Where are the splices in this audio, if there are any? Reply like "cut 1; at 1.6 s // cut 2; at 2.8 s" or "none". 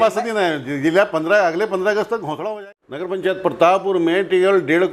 cut 1; at 2.5 s